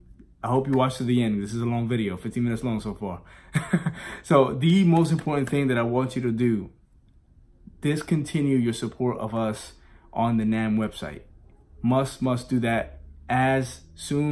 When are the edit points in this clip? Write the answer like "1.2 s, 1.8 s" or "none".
none